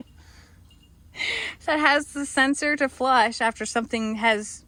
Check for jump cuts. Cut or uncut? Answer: uncut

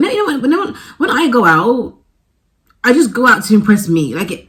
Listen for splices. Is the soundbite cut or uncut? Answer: uncut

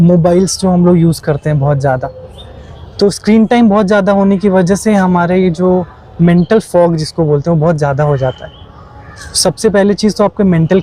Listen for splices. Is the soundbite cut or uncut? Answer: uncut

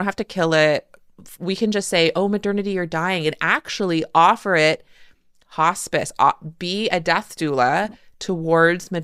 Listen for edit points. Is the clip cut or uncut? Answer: uncut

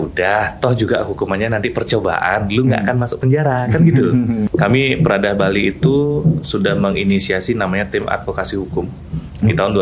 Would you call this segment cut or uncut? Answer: cut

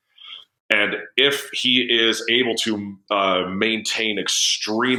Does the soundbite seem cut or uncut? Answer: uncut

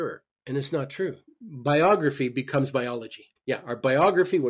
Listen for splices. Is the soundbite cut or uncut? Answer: cut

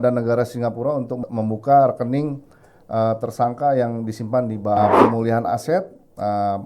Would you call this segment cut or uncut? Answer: cut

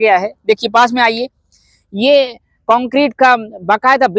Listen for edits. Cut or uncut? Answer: uncut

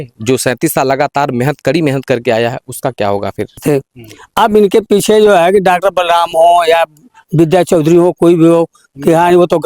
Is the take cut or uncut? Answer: cut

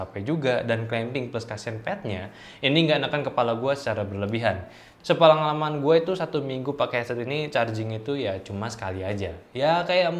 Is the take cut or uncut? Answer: cut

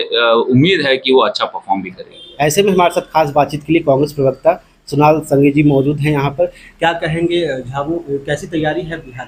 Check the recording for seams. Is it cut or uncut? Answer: uncut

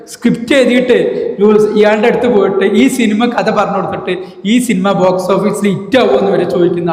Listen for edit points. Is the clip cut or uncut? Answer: uncut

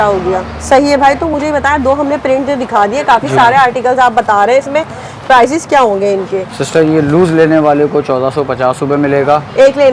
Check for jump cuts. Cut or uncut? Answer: uncut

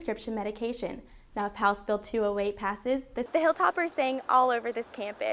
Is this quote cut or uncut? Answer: cut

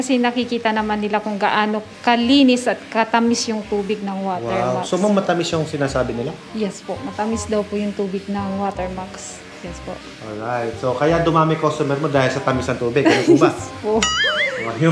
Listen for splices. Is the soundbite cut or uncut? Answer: uncut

